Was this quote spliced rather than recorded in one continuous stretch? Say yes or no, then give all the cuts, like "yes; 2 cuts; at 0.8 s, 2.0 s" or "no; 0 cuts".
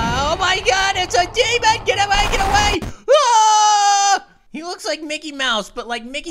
yes; 1 cut; at 4.4 s